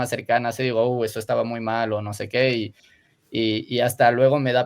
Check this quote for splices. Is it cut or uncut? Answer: uncut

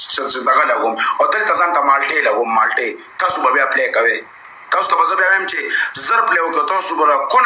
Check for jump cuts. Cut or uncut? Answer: uncut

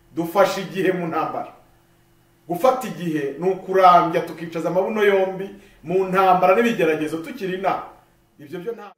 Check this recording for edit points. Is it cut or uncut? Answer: uncut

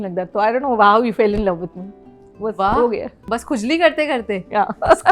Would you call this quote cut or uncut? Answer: uncut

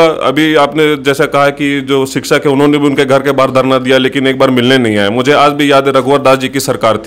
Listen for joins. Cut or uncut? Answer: uncut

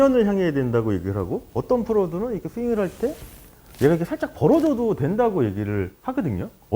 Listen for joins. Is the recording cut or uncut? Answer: uncut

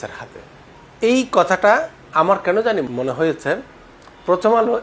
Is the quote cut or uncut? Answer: uncut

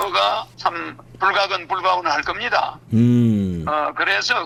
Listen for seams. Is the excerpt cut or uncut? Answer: uncut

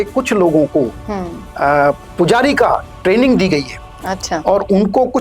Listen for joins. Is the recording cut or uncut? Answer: uncut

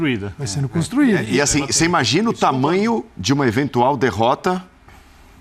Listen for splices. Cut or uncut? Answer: uncut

